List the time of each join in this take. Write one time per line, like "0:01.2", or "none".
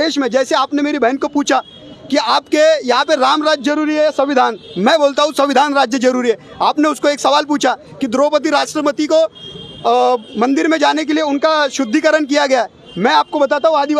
none